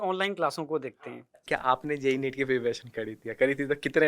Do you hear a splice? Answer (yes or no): yes